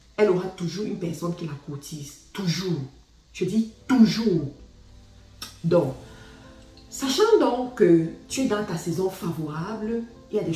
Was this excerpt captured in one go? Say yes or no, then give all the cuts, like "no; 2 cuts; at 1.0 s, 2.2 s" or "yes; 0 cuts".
yes; 0 cuts